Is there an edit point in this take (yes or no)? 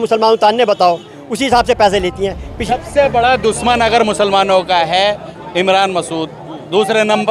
yes